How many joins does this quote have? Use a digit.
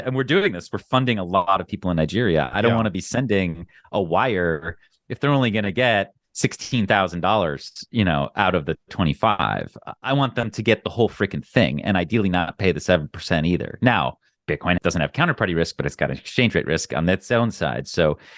1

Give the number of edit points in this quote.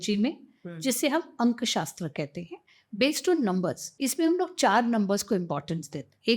1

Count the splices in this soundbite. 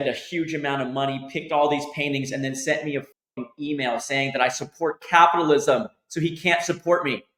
0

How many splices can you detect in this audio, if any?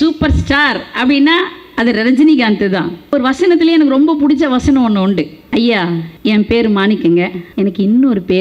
4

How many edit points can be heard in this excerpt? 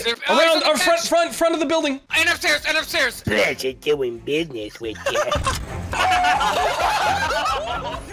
1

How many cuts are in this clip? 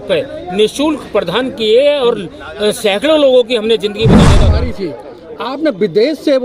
1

